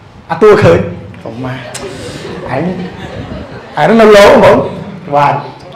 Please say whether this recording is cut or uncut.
uncut